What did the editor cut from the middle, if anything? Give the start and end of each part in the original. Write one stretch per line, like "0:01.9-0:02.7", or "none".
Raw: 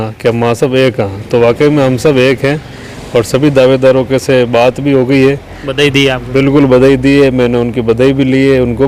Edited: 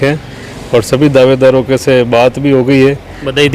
none